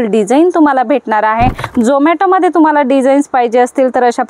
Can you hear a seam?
yes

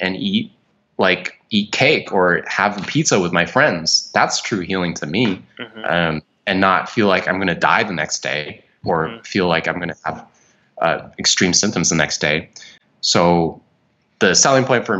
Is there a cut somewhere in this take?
no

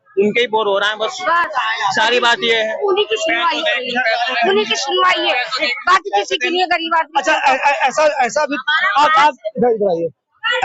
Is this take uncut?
yes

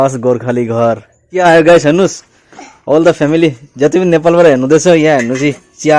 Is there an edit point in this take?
yes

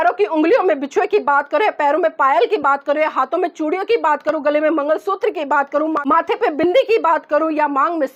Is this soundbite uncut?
yes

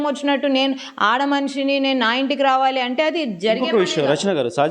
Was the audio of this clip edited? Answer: no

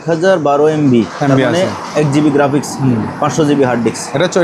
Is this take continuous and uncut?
yes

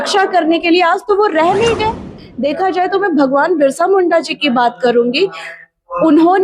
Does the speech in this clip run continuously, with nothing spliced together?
no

